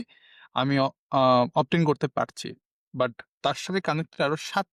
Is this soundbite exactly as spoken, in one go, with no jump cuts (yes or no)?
yes